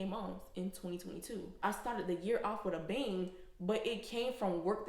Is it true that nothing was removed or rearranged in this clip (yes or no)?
no